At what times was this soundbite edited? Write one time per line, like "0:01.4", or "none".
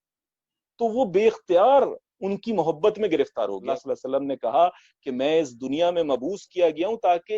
0:03.7

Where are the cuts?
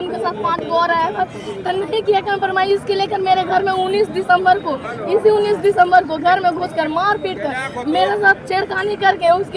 none

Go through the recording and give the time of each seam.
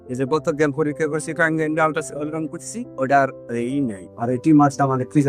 none

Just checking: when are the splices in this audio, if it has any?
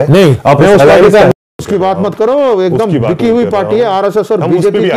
0:01.3

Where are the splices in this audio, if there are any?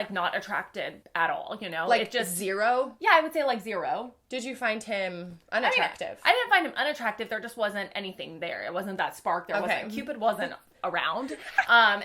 0:01.0

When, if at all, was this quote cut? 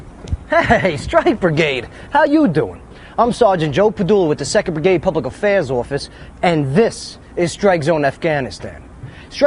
0:05.3

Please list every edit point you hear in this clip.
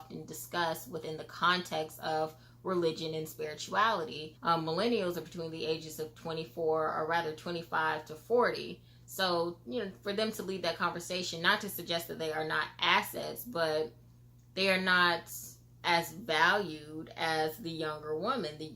0:04.3

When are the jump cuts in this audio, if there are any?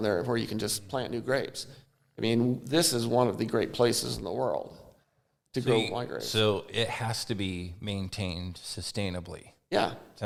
none

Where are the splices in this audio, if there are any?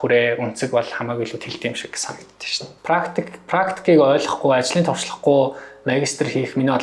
0:02.7

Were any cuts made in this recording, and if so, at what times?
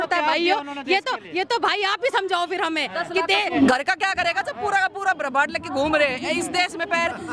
0:03.5

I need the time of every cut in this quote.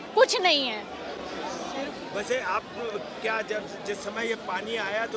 none

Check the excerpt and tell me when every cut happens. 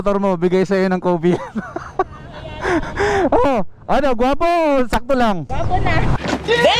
none

